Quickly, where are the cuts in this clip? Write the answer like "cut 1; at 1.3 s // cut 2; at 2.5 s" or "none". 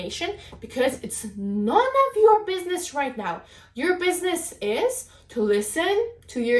none